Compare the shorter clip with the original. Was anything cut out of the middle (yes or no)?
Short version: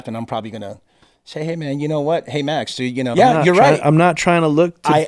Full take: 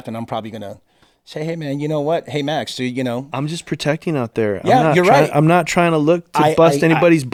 yes